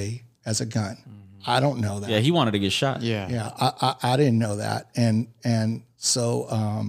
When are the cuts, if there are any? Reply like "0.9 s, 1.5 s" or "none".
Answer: none